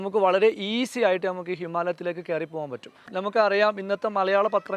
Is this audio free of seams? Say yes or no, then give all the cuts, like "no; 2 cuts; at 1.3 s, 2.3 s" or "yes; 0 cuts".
no; 1 cut; at 3.1 s